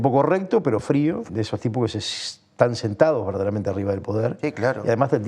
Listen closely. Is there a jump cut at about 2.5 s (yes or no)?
no